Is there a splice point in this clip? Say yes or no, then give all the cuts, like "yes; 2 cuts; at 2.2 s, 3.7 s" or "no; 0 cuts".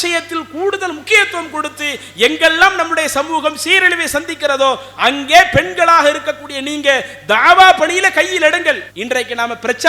no; 0 cuts